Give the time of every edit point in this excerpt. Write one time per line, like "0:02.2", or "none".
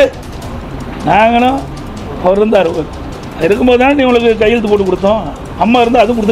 none